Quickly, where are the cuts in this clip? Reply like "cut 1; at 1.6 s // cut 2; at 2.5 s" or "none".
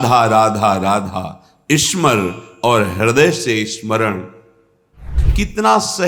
cut 1; at 5.2 s